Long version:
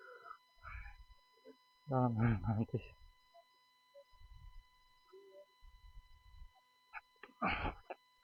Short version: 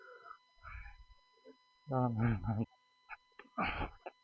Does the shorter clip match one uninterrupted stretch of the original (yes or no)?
no